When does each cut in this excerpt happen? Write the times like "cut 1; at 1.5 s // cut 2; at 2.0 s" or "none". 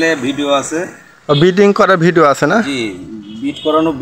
none

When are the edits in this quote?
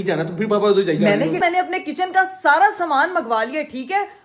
cut 1; at 1.4 s

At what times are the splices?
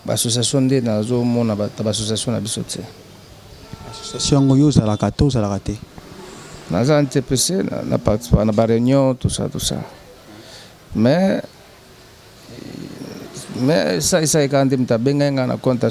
none

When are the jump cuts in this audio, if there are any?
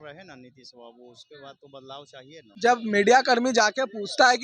cut 1; at 2.4 s

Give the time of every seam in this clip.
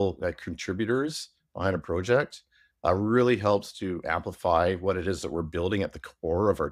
none

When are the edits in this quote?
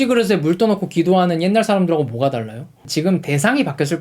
cut 1; at 2.8 s

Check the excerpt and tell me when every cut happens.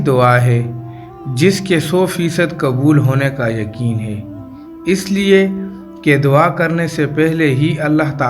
none

